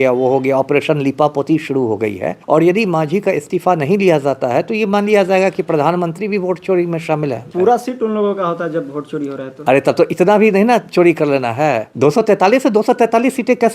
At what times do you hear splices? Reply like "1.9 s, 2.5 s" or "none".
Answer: 2.3 s, 7.5 s, 11.9 s